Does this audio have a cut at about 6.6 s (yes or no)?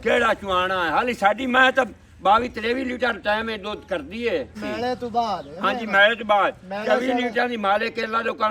no